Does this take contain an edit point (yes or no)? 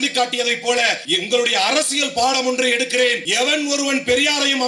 yes